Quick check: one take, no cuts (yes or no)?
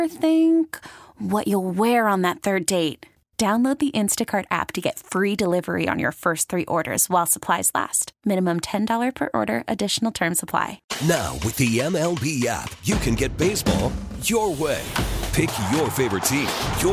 no